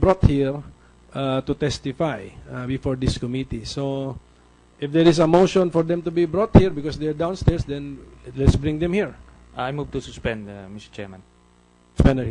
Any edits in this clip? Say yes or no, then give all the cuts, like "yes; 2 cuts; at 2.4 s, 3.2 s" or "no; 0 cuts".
no; 0 cuts